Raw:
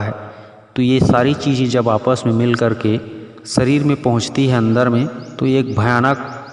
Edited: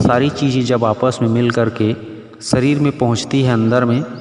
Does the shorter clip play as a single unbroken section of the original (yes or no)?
yes